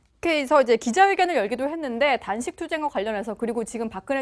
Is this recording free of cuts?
yes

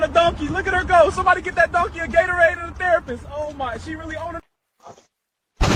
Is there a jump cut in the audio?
no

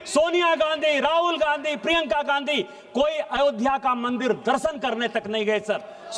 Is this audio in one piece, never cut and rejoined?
yes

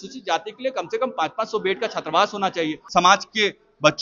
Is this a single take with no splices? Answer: no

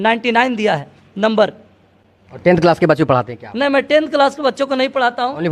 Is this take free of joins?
yes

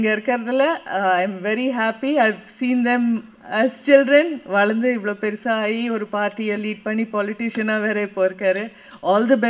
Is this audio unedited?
yes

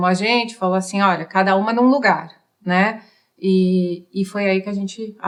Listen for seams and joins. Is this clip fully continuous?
yes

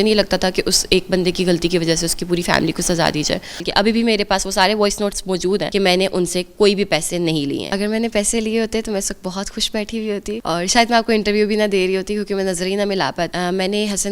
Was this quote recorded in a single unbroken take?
no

